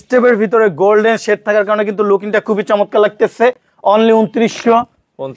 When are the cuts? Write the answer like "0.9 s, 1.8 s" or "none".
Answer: none